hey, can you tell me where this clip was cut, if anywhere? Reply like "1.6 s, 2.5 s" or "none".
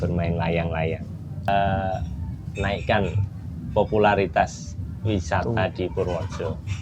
1.5 s